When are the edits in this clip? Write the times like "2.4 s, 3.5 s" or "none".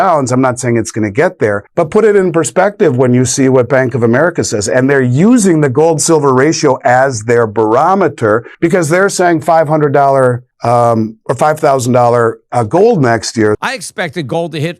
1.6 s, 8.5 s, 10.5 s, 13.6 s